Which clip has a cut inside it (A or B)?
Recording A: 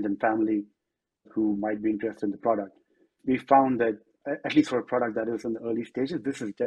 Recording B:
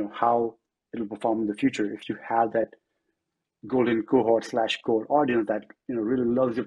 A